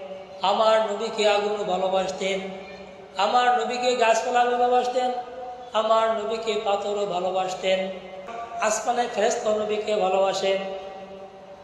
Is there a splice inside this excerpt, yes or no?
yes